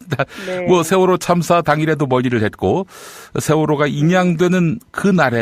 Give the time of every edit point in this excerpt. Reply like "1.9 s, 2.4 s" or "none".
none